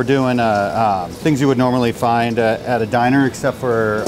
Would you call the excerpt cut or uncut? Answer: cut